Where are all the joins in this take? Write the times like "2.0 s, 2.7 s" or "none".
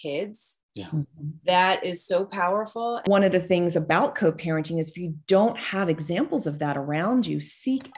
3.1 s

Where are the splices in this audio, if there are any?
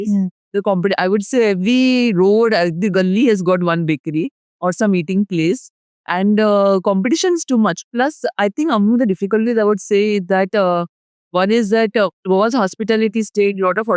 none

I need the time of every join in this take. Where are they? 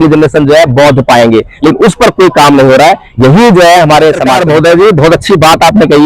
4.4 s

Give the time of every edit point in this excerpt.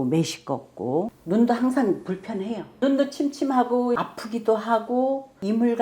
1.2 s, 2.7 s

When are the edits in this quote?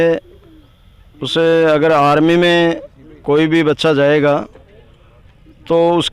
none

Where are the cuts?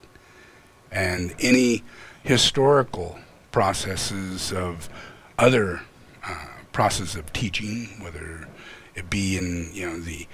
none

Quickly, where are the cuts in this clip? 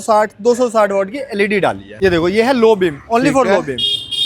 1.9 s

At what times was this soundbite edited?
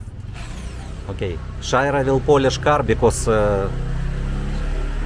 none

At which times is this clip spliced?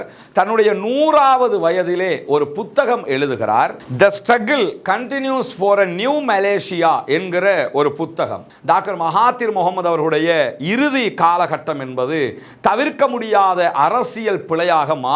8.5 s

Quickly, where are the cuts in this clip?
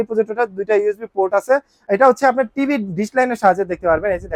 1.7 s

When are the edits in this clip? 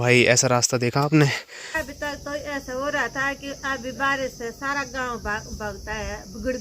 1.7 s

